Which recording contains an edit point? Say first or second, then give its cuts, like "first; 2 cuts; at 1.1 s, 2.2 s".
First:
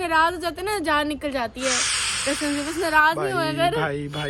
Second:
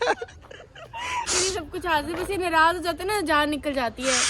second; 1 cut; at 1.3 s